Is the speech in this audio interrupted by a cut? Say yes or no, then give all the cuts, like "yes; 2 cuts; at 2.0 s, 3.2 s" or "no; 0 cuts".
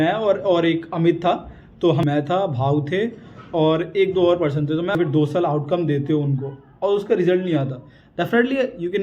yes; 2 cuts; at 2.0 s, 4.9 s